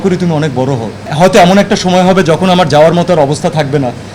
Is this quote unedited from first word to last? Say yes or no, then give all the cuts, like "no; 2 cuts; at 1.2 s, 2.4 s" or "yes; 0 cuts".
no; 1 cut; at 1.0 s